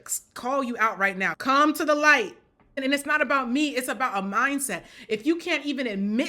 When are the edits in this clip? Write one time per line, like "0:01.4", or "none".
0:01.3
0:02.8